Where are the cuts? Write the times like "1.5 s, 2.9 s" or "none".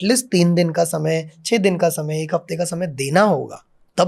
none